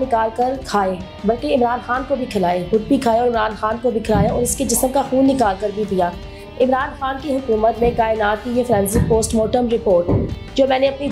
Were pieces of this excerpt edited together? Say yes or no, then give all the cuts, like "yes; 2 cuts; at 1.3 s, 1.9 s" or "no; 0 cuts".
no; 0 cuts